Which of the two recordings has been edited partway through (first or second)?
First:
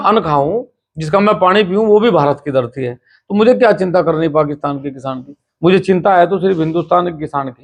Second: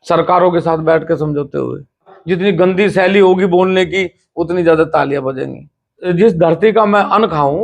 second